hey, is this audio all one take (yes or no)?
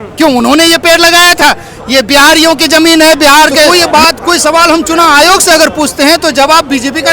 no